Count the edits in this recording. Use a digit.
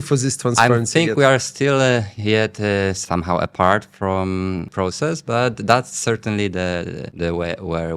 3